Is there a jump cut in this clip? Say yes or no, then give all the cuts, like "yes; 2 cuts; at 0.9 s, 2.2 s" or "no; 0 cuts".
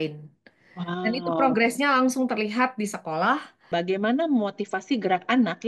yes; 1 cut; at 3.6 s